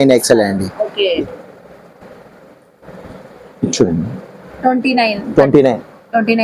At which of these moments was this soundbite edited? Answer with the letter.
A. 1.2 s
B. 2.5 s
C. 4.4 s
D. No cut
A